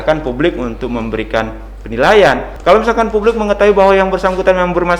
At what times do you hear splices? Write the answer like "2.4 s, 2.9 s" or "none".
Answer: 2.5 s